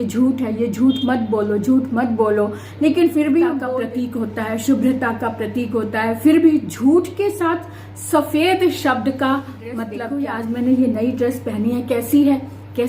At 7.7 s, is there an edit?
no; 2 cuts; at 3.6 s, 9.9 s

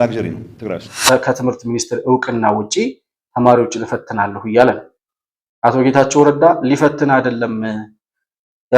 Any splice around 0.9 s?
yes; 1 cut; at 0.9 s

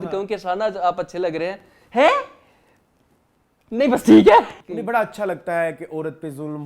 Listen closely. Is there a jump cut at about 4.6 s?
yes; 1 cut; at 4.6 s

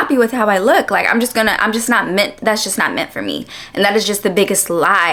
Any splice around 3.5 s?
no; 0 cuts

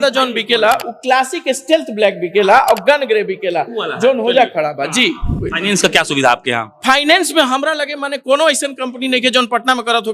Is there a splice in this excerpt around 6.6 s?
no; 1 cut; at 5.3 s

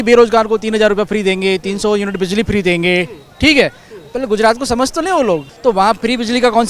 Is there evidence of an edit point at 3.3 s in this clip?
no; 1 cut; at 5.5 s

